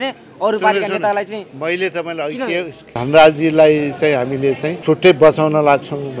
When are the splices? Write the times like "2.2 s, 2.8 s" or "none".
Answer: 3.0 s, 4.7 s